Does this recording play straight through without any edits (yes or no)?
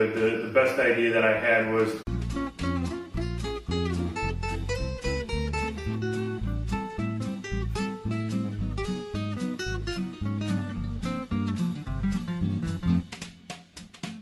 yes